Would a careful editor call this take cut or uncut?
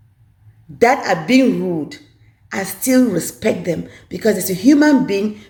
uncut